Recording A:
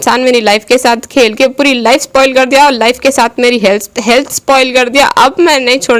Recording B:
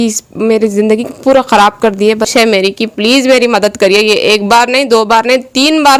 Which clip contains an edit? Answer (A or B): B